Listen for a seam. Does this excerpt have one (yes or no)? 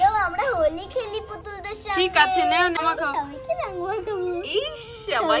yes